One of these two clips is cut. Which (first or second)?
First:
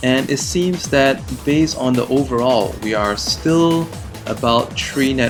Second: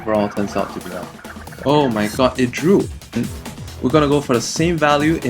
second